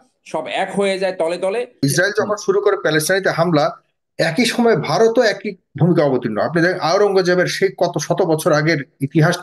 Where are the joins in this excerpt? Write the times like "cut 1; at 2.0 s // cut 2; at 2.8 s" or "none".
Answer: cut 1; at 1.8 s